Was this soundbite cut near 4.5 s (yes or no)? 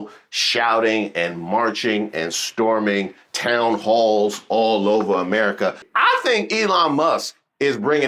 no